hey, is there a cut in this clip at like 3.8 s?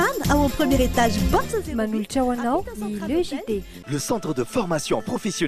yes; 1 cut; at 3.8 s

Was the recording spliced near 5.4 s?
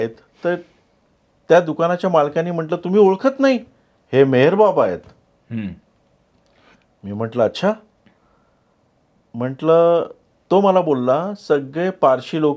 no; 0 cuts

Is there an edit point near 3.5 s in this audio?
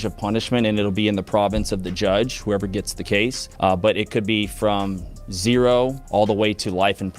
yes; 2 cuts; at 3.5 s, 6.0 s

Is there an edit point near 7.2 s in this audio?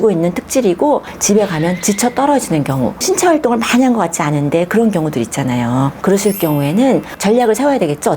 no; 3 cuts; at 1.1 s, 3.0 s, 5.9 s

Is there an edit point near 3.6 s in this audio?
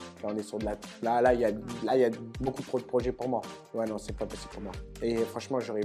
yes; 1 cut; at 3.6 s

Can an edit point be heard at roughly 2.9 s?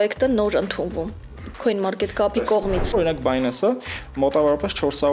yes; 1 cut; at 2.9 s

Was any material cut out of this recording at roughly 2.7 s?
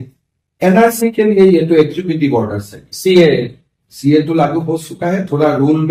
no; 0 cuts

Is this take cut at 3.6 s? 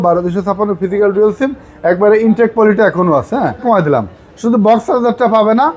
yes; 1 cut; at 3.6 s

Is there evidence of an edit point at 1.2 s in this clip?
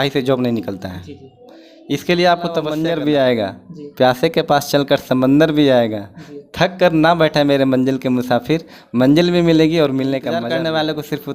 no; 2 cuts; at 2.8 s, 10.4 s

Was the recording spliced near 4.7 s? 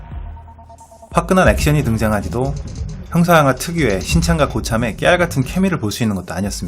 no; 1 cut; at 2.2 s

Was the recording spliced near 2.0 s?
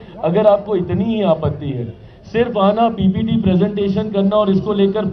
no; 0 cuts

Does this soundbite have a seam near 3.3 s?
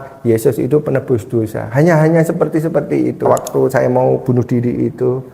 yes; 1 cut; at 3.3 s

